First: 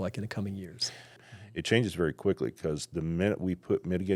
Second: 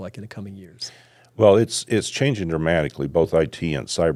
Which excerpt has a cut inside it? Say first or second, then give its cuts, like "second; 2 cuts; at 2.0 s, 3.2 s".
first; 1 cut; at 1.2 s